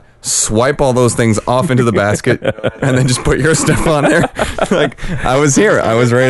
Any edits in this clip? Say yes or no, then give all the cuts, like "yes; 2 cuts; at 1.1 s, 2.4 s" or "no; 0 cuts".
yes; 1 cut; at 2.6 s